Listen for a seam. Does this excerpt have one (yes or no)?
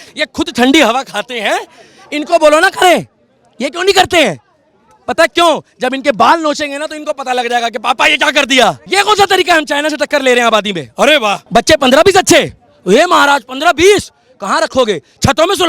yes